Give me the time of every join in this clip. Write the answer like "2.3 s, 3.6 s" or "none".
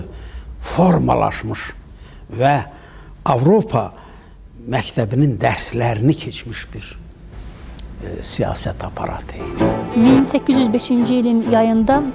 9.4 s